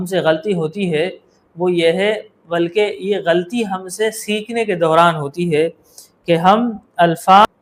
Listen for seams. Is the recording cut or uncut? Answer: uncut